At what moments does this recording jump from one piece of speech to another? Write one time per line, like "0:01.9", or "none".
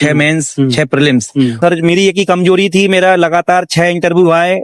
0:01.6